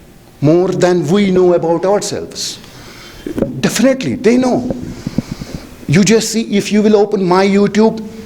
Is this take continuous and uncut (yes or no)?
yes